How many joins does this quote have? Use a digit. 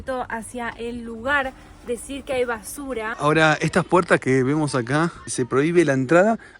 2